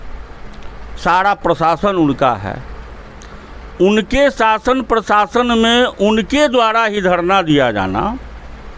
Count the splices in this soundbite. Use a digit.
0